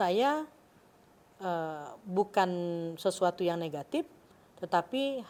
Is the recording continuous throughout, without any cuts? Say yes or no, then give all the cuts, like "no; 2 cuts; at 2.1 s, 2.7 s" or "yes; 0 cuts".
yes; 0 cuts